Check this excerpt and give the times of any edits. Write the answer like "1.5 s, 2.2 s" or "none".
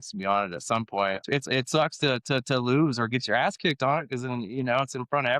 1.2 s